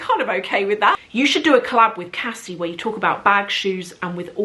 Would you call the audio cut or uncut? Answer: cut